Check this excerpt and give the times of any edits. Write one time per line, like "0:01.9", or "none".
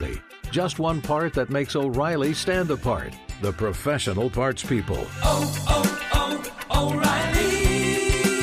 none